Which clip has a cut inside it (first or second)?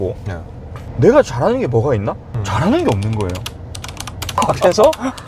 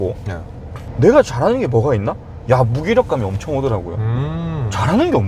first